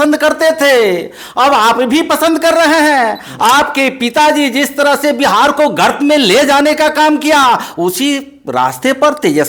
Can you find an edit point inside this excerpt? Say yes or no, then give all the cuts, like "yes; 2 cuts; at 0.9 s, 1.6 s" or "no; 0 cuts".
no; 0 cuts